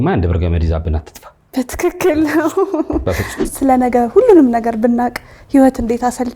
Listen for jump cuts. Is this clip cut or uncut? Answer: cut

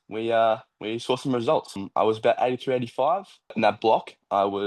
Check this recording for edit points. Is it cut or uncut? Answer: cut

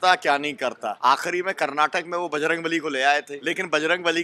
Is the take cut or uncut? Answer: cut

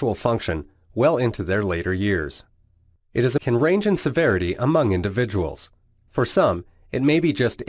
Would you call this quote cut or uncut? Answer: uncut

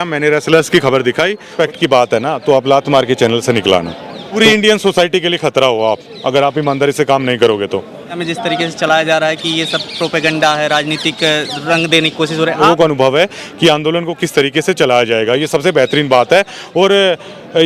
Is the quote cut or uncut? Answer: cut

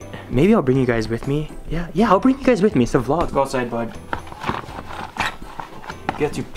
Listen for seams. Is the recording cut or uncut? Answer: cut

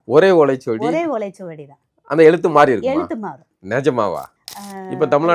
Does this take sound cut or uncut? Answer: cut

